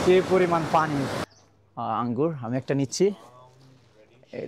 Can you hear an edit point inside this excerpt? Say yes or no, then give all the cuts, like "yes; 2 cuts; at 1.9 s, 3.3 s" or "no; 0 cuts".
yes; 1 cut; at 1.2 s